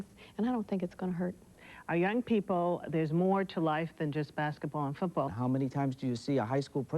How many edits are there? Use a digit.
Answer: 2